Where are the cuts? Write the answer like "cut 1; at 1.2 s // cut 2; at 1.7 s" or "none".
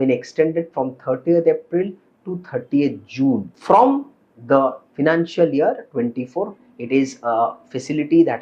cut 1; at 3.5 s // cut 2; at 6.6 s